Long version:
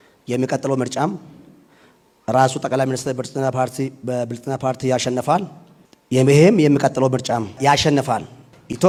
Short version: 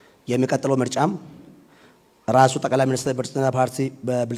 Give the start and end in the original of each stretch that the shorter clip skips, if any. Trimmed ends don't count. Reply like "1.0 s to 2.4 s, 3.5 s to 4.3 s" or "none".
none